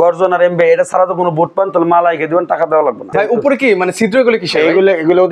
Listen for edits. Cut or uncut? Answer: cut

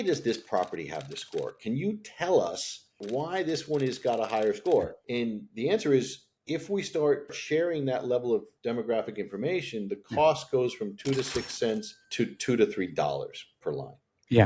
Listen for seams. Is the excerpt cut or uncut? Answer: cut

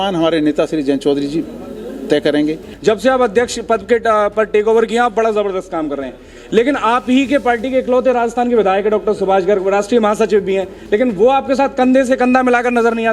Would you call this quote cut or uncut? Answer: cut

